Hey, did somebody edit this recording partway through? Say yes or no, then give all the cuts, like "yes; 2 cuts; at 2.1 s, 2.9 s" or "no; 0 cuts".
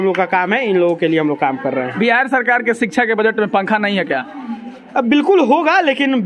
no; 0 cuts